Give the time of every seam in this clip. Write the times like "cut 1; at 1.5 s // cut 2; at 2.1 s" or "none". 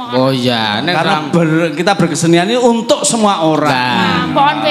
none